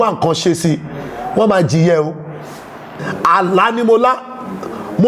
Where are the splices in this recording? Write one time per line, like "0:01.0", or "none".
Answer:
0:03.0

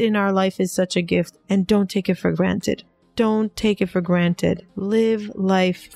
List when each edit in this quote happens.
0:01.3

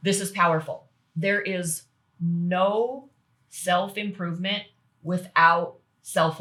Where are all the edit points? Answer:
none

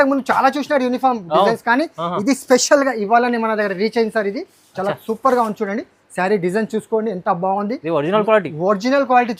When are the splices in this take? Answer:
none

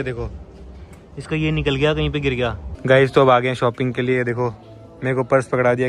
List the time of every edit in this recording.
0:02.7

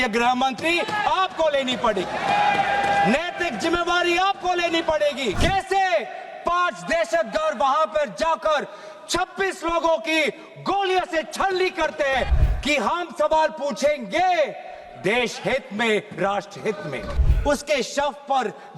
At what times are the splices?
0:05.4
0:12.4
0:17.2

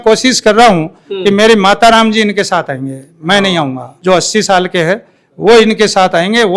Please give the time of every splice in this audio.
none

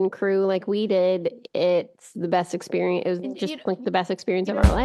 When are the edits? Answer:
none

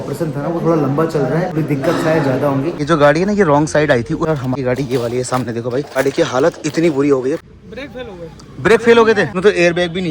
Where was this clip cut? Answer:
0:01.5
0:02.8
0:04.4
0:06.0
0:07.5
0:09.3

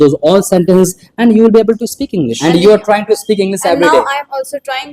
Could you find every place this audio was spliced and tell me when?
0:02.3

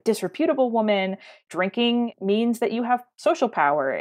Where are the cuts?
0:01.4

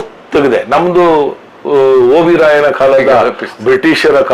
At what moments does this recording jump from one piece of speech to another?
none

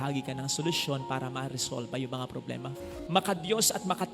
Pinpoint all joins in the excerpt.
0:02.9

